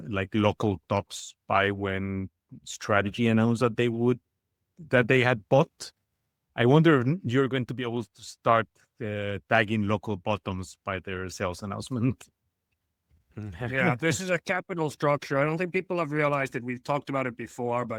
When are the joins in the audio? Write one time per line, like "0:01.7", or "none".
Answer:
none

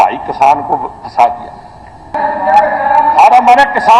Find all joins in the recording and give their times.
0:02.2

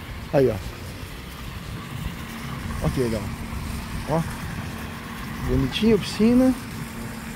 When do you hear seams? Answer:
none

